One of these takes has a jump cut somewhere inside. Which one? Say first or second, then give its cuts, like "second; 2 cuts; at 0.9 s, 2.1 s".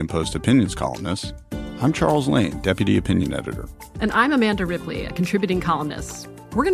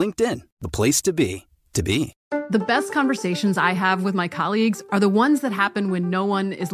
second; 1 cut; at 2.2 s